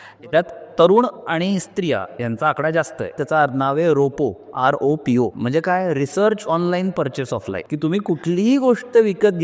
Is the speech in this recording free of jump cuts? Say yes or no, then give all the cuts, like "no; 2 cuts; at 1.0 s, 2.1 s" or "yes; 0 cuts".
no; 3 cuts; at 3.2 s, 5.4 s, 7.6 s